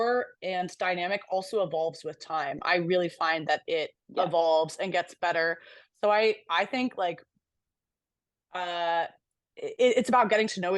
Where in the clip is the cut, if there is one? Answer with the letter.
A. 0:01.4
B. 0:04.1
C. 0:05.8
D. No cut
D